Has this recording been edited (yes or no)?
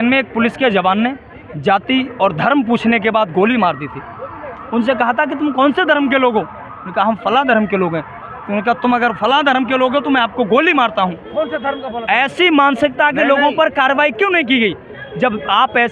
no